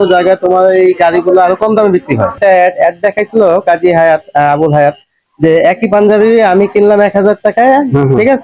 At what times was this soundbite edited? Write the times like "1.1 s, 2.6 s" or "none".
2.4 s